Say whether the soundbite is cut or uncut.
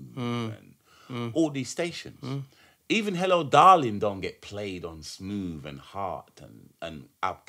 uncut